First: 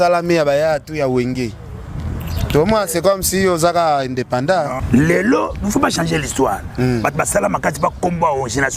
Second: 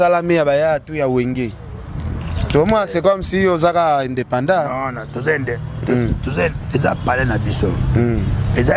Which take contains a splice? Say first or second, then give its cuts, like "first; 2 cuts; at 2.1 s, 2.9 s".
first; 1 cut; at 4.8 s